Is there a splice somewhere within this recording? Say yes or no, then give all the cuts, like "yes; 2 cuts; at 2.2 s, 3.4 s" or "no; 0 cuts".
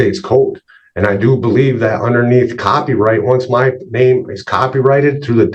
no; 0 cuts